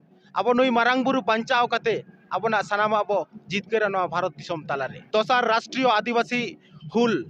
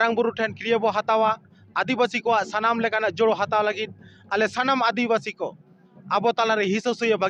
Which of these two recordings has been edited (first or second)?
first